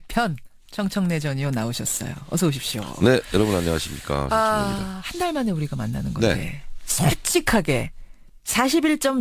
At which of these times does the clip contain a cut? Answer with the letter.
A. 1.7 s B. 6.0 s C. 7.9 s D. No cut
D